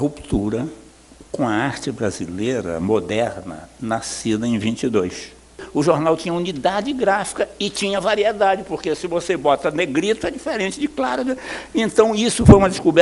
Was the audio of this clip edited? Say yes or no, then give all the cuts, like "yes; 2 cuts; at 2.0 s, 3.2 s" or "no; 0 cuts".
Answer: yes; 1 cut; at 5.6 s